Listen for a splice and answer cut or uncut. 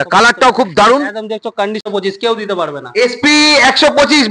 cut